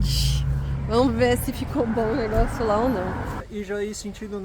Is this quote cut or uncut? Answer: cut